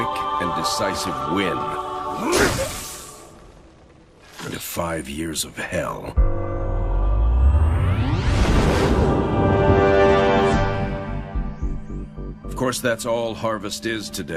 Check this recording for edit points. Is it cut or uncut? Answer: uncut